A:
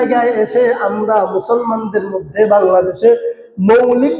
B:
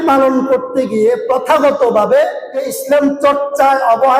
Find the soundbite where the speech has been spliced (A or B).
B